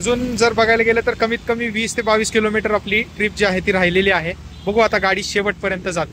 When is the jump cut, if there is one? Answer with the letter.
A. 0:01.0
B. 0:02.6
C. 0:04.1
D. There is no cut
D